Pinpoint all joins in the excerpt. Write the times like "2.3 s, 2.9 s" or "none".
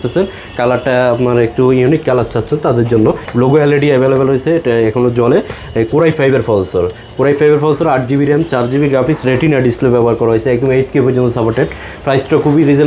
3.2 s, 11.9 s